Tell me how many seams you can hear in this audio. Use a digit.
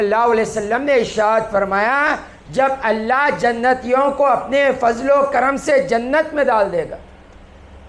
0